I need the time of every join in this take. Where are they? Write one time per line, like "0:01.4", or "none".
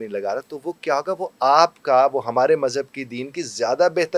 none

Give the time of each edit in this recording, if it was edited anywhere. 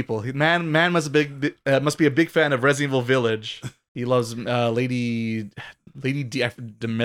0:05.8

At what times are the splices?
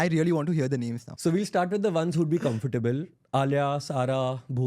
0:01.1

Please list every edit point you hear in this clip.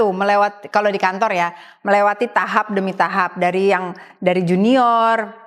none

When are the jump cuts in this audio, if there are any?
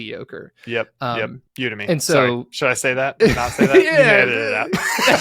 0:01.4

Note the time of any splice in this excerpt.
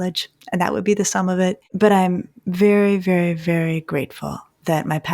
0:01.7

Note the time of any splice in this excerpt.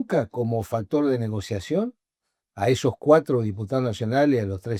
none

